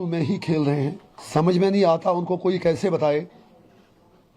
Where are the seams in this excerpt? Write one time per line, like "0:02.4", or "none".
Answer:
0:01.1